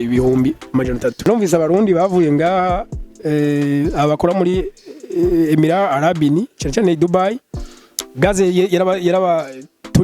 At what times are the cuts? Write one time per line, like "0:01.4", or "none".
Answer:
0:01.3